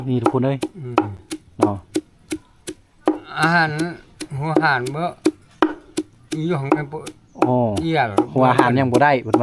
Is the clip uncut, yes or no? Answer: yes